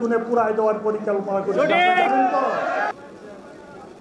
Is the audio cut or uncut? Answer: cut